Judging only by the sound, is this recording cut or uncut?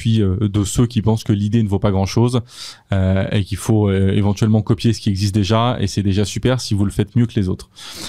uncut